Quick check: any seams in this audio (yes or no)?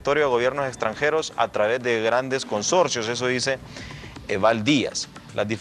yes